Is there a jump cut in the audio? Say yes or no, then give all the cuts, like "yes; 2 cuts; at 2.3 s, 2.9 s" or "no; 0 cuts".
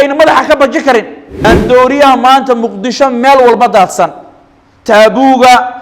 yes; 1 cut; at 1.2 s